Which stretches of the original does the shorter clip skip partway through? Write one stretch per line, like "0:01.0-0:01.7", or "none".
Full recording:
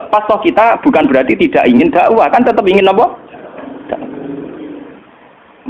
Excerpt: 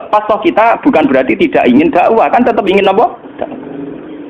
0:03.3-0:03.8